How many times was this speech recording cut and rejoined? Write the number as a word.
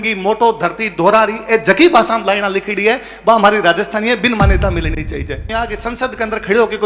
one